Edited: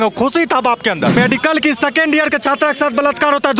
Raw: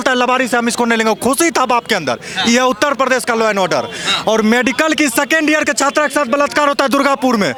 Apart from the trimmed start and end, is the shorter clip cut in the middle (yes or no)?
yes